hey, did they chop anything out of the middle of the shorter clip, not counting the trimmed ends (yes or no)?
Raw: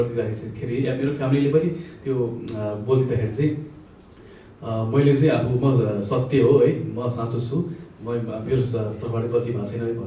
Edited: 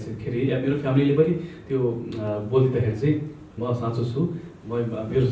yes